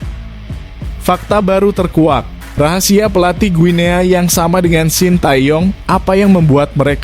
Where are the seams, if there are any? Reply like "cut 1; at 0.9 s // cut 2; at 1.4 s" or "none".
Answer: cut 1; at 1.0 s